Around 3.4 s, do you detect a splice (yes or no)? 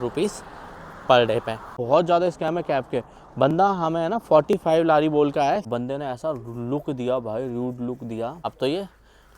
no